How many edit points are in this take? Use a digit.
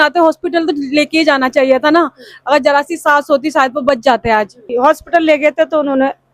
1